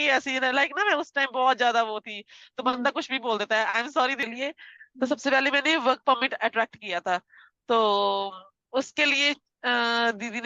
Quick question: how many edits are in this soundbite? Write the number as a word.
one